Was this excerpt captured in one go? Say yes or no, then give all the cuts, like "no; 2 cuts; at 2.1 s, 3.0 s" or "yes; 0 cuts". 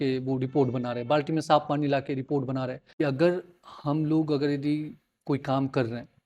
no; 1 cut; at 2.8 s